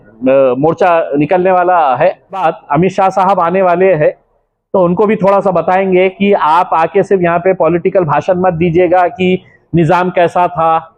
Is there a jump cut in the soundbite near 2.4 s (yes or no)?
yes